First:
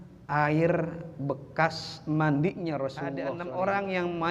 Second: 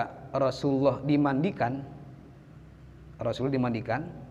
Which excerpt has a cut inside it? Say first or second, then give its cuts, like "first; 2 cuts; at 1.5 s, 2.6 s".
first; 1 cut; at 3.3 s